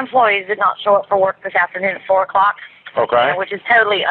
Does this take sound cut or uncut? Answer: uncut